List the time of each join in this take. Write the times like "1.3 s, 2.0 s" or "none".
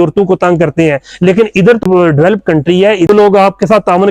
1.8 s, 3.1 s